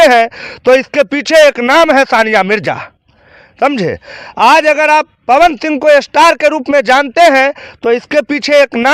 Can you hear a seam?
no; 0 cuts

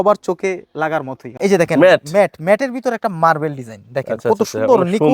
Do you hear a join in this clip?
yes; 1 cut; at 1.2 s

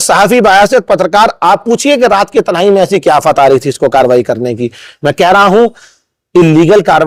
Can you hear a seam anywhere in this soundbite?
no; 0 cuts

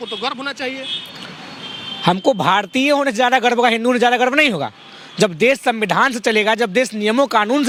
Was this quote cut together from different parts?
no; 0 cuts

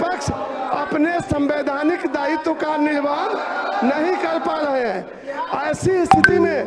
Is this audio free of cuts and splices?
yes; 0 cuts

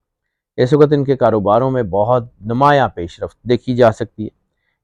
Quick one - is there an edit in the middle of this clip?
no; 0 cuts

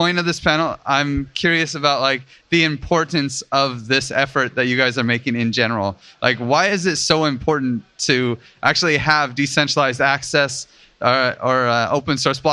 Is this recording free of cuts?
yes; 0 cuts

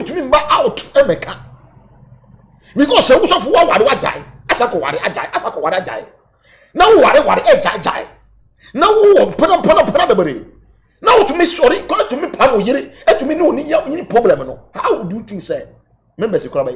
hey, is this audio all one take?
yes; 0 cuts

